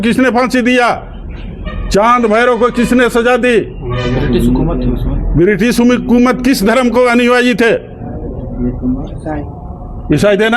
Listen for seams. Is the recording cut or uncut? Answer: uncut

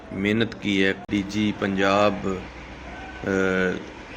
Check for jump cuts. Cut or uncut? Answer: cut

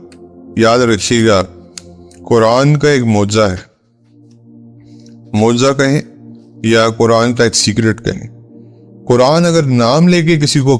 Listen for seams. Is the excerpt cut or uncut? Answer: uncut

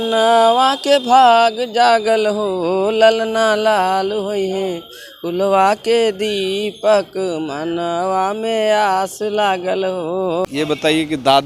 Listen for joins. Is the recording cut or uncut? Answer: cut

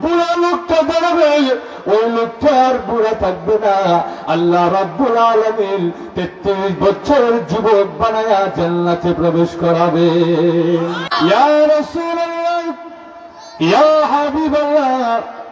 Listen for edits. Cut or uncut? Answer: cut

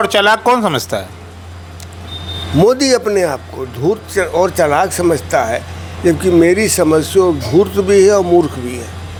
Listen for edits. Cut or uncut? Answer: uncut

